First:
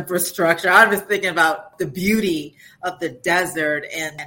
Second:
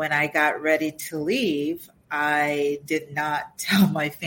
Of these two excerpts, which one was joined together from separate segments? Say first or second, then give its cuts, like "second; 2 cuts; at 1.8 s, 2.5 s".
first; 1 cut; at 1.7 s